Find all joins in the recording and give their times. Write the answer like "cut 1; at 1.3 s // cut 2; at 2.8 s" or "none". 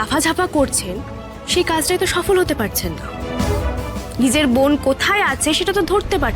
none